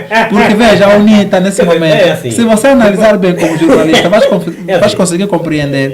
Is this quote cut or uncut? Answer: uncut